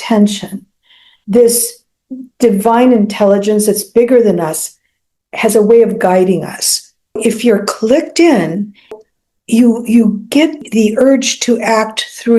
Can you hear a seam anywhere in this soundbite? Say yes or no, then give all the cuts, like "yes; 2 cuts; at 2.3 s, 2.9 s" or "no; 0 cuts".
yes; 3 cuts; at 7.2 s, 8.9 s, 10.6 s